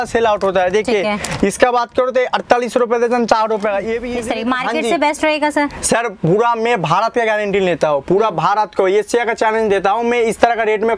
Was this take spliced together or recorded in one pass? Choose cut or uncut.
cut